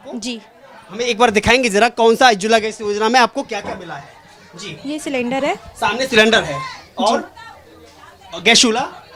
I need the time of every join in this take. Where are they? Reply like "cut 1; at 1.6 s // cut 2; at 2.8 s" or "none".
none